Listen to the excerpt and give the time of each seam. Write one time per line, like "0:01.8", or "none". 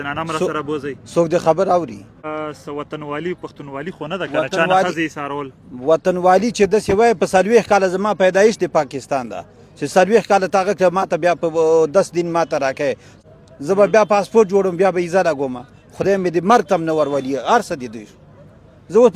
0:02.3
0:13.1